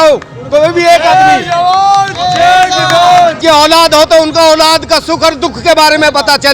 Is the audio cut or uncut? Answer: cut